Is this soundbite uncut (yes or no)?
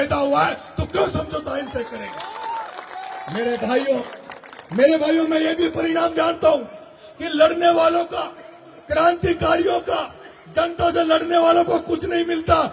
yes